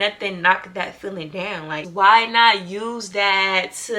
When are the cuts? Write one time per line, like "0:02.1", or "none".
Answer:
0:01.9

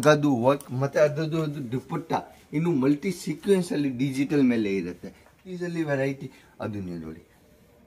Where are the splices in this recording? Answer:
0:05.6

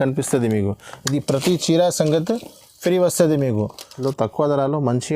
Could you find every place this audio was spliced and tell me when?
0:03.9

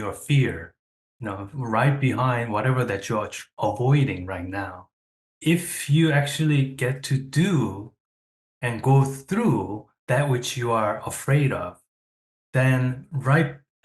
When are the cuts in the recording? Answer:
0:05.2

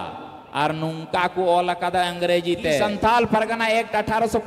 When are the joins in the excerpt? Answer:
0:02.9

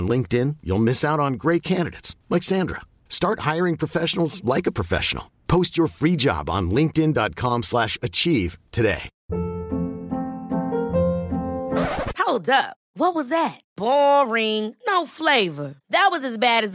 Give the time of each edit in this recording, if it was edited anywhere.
0:09.1

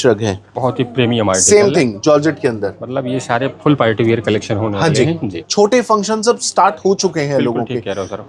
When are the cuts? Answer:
0:05.3

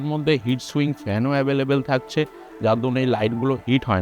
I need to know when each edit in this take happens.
none

